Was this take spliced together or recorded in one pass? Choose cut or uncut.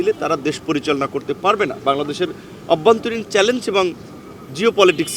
uncut